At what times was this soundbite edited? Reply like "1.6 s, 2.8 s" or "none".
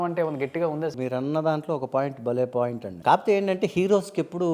0.9 s, 2.9 s

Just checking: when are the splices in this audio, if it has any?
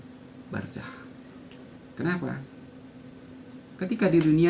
1.8 s

